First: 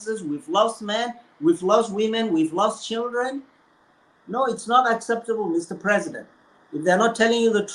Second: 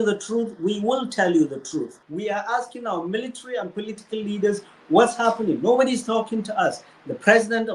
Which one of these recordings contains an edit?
second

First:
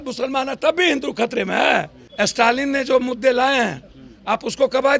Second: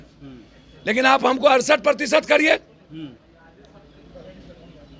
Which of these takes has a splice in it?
first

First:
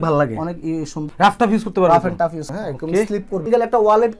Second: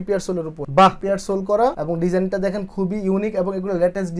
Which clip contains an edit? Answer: first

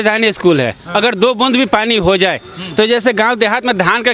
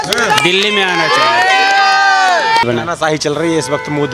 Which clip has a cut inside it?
second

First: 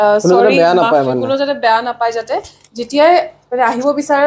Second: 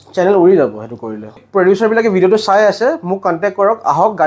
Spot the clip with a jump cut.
second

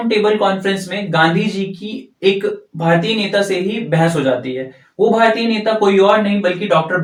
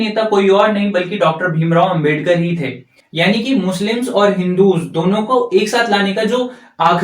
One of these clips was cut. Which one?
second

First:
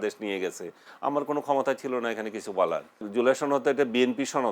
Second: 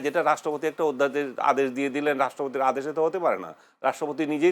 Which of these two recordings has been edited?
first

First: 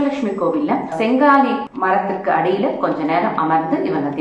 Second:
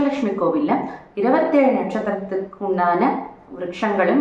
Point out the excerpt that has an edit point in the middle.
first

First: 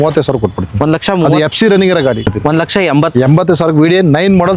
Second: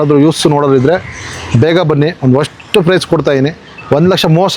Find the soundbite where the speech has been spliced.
first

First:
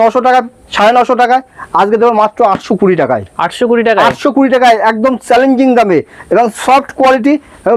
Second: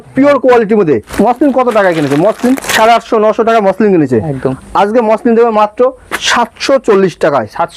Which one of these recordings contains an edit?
second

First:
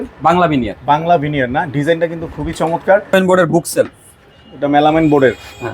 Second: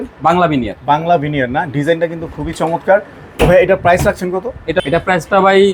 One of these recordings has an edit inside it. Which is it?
first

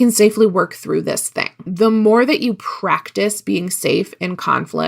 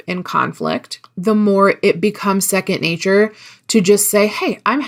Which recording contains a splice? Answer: first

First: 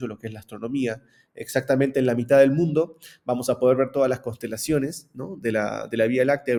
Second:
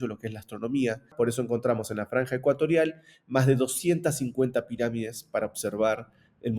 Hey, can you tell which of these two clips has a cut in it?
second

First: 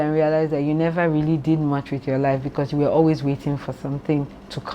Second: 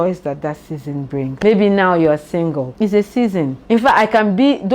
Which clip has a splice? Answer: second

